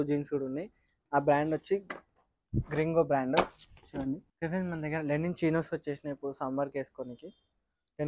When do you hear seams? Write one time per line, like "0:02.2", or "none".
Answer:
0:04.3